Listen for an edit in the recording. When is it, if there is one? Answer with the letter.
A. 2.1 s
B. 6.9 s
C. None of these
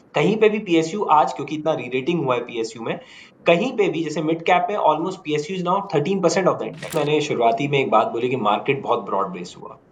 B